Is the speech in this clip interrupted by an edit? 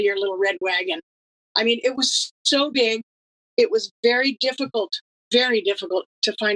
no; 0 cuts

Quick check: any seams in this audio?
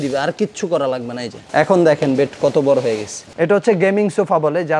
yes; 1 cut; at 3.3 s

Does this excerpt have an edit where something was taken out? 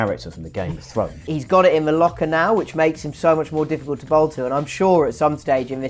yes; 1 cut; at 1.3 s

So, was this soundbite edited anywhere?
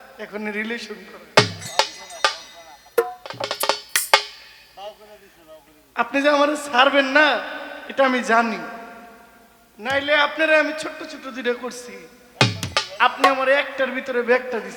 no; 0 cuts

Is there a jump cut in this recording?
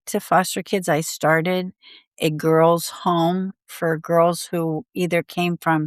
yes; 1 cut; at 3.5 s

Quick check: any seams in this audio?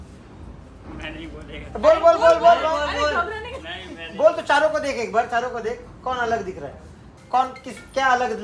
yes; 1 cut; at 7.1 s

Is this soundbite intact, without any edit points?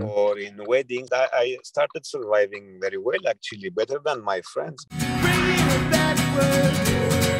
no; 2 cuts; at 1.1 s, 4.8 s

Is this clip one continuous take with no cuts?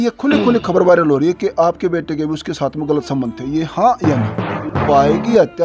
no; 1 cut; at 4.6 s

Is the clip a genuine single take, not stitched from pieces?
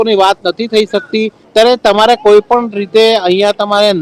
no; 1 cut; at 1.4 s

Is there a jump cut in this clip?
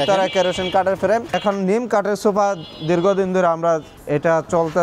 yes; 2 cuts; at 1.4 s, 3.9 s

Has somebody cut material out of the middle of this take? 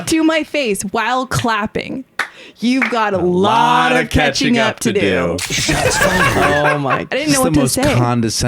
yes; 2 cuts; at 2.0 s, 7.1 s

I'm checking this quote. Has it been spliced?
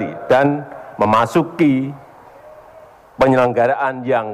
no; 0 cuts

